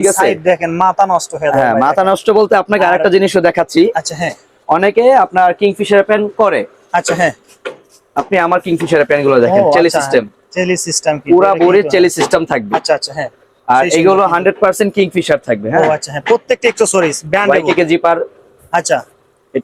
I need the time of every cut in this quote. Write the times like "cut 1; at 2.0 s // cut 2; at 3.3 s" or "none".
none